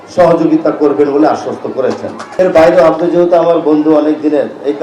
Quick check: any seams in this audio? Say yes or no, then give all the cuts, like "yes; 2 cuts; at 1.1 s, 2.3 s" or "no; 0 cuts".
yes; 1 cut; at 2.4 s